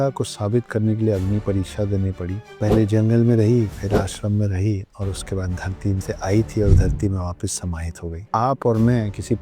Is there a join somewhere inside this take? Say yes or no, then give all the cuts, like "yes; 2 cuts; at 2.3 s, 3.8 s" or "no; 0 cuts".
yes; 1 cut; at 8.2 s